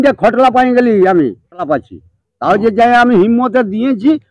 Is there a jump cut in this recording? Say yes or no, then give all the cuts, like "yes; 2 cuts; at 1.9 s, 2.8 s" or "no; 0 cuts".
yes; 1 cut; at 1.6 s